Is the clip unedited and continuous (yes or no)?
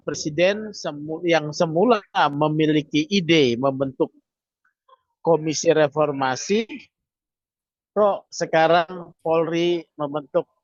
yes